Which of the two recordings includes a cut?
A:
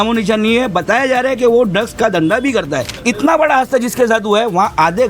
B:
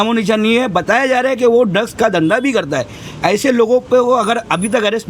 A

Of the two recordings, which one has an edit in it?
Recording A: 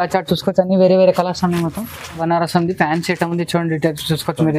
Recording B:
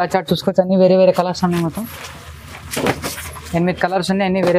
A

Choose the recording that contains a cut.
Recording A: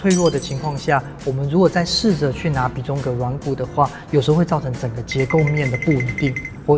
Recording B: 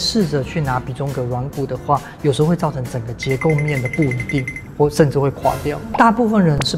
B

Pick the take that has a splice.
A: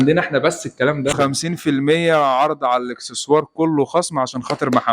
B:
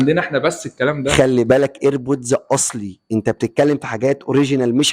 A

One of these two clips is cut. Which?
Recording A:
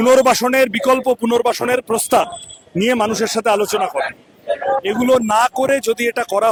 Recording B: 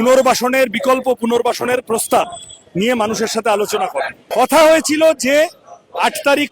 B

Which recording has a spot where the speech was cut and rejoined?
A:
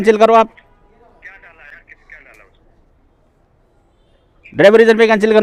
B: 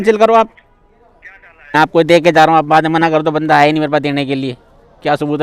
B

